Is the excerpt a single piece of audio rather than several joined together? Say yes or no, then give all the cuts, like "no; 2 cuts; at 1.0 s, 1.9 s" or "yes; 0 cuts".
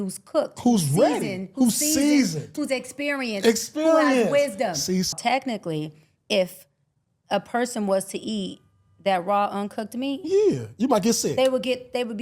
no; 1 cut; at 5.1 s